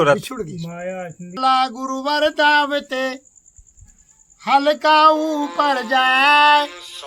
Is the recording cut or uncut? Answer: cut